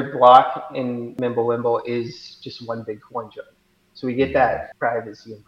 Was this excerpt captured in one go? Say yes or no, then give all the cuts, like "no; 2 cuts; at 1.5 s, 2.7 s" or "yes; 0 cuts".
no; 2 cuts; at 1.1 s, 4.7 s